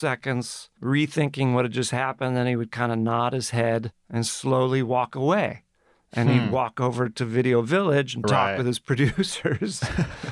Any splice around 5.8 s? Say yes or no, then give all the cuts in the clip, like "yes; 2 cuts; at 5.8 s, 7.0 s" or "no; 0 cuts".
no; 1 cut; at 4.0 s